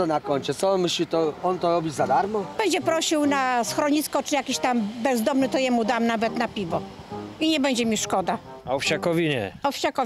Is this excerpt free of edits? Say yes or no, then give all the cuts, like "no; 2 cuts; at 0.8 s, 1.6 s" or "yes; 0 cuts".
no; 2 cuts; at 2.5 s, 8.6 s